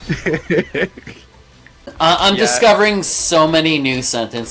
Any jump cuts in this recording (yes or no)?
yes